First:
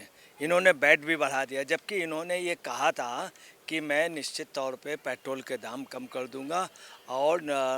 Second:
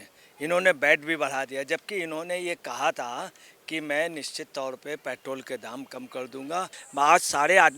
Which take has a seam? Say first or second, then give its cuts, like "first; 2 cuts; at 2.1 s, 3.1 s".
second; 1 cut; at 6.8 s